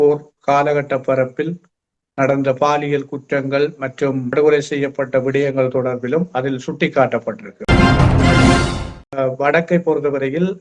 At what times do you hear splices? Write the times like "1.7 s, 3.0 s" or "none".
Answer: 4.3 s, 7.5 s, 9.0 s